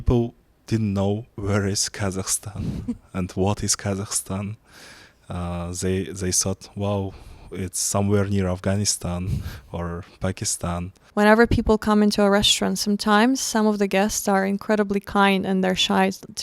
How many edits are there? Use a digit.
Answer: 1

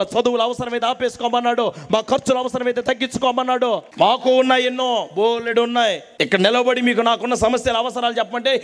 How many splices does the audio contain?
2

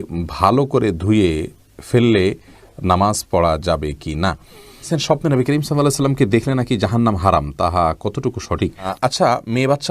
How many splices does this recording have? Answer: 2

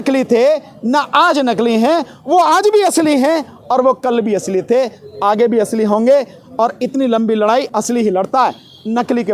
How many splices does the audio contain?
1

